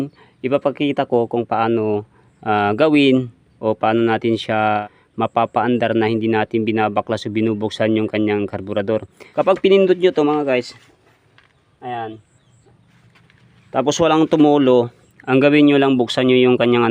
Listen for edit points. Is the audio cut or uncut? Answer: cut